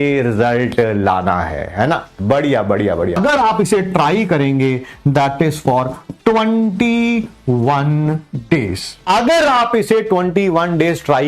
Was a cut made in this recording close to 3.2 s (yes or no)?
yes